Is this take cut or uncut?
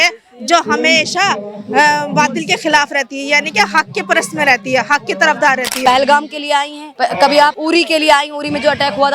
cut